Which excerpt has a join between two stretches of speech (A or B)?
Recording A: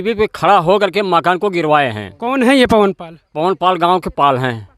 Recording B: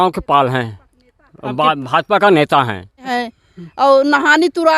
B